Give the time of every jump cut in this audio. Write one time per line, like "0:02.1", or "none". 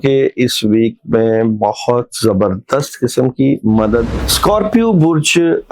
0:04.2